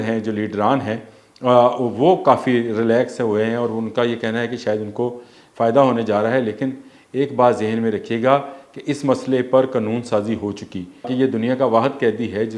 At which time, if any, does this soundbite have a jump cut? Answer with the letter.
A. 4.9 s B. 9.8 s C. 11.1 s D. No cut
C